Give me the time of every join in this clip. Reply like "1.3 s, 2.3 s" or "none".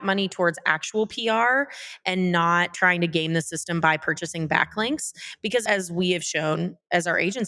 none